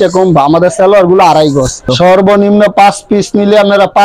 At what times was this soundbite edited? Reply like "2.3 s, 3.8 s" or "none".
1.9 s